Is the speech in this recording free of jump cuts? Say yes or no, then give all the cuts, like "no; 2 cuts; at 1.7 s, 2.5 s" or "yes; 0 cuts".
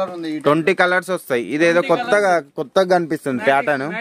yes; 0 cuts